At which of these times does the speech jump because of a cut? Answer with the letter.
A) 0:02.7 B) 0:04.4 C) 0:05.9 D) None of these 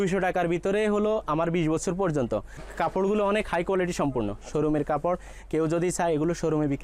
A